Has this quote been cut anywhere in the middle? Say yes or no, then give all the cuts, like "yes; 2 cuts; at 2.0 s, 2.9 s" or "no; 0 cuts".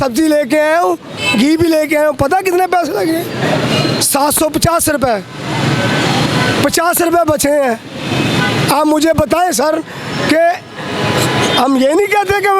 no; 0 cuts